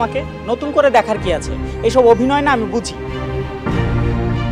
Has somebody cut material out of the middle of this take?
no; 0 cuts

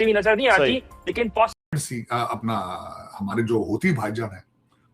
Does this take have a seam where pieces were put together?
yes; 1 cut; at 1.5 s

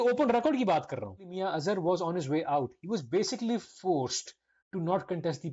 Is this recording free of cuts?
no; 1 cut; at 1.3 s

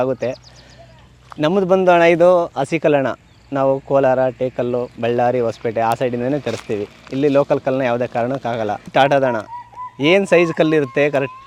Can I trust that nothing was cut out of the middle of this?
no; 1 cut; at 8.9 s

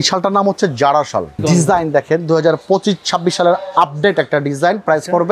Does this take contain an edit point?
yes; 1 cut; at 1.4 s

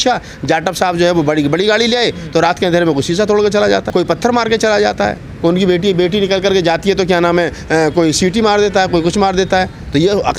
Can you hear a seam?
yes; 1 cut; at 3.9 s

